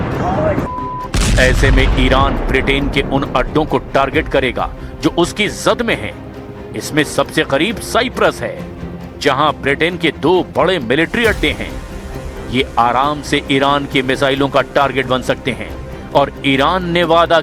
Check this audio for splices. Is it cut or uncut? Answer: uncut